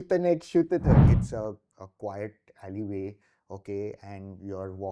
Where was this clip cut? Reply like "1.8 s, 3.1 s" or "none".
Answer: 1.0 s